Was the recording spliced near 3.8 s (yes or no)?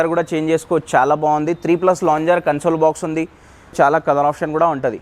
yes